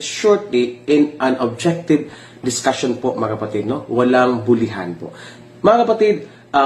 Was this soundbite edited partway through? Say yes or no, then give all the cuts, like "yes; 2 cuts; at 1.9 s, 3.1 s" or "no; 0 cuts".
yes; 1 cut; at 3.8 s